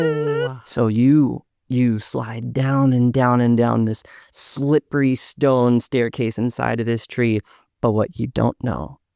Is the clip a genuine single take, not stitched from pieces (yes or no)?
yes